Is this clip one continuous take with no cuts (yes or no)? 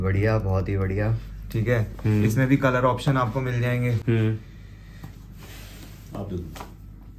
yes